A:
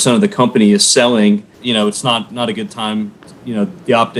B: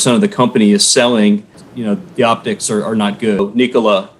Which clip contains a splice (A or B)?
B